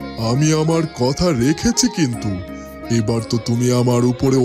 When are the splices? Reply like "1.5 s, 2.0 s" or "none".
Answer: none